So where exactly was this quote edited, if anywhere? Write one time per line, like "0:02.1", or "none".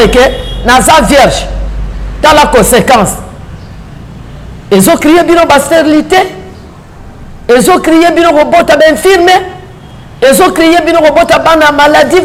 none